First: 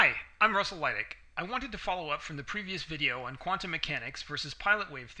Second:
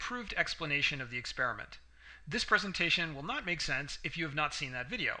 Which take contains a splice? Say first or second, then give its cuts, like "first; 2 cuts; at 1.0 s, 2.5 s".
first; 1 cut; at 1.1 s